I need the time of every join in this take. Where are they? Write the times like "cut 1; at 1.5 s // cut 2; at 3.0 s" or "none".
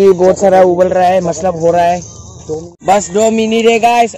cut 1; at 2.7 s